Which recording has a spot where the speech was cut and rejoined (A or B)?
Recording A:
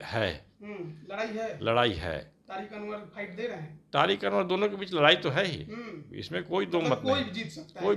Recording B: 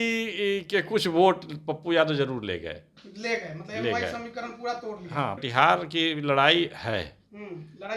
B